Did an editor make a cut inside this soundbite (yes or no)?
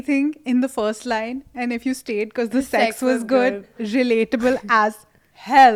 no